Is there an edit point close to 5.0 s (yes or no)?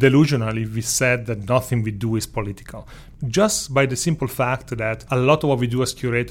yes